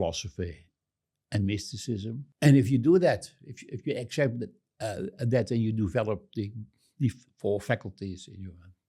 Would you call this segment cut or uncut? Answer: cut